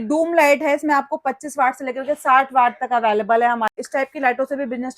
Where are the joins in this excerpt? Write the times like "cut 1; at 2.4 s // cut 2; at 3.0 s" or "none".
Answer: cut 1; at 3.8 s